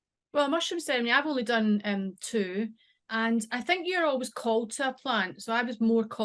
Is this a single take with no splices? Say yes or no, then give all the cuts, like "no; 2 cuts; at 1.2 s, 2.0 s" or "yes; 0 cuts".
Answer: no; 1 cut; at 3.1 s